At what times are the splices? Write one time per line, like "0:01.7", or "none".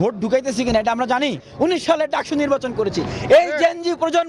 0:01.4